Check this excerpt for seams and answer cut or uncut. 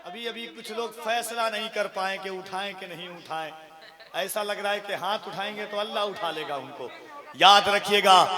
uncut